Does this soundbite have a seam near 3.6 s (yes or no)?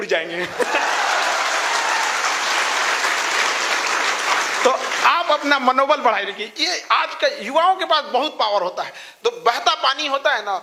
no